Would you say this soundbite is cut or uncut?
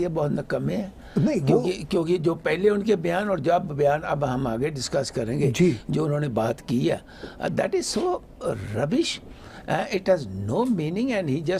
uncut